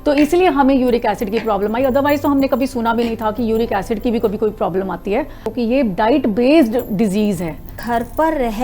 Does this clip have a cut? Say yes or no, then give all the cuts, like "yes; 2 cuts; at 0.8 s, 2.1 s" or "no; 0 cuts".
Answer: yes; 2 cuts; at 5.5 s, 7.8 s